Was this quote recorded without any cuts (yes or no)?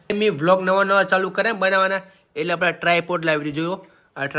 yes